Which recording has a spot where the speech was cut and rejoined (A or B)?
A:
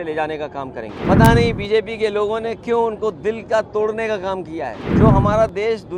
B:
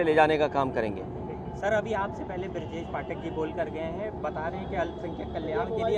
A